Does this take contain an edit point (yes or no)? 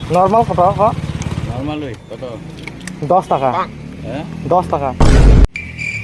no